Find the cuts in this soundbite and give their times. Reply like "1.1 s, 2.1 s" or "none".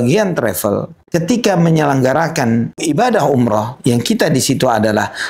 1.0 s, 2.8 s